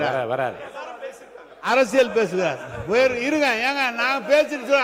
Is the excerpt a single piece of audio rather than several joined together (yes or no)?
yes